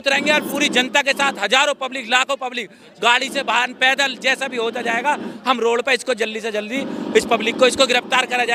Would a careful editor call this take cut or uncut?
uncut